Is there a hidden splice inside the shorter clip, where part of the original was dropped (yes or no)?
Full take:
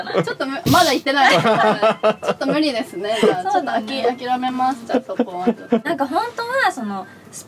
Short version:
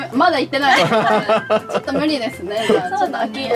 no